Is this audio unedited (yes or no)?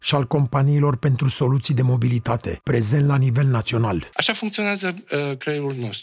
no